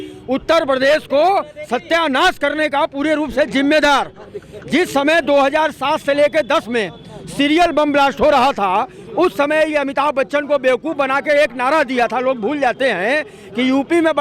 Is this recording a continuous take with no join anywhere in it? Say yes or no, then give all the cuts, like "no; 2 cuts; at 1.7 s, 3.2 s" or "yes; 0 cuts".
yes; 0 cuts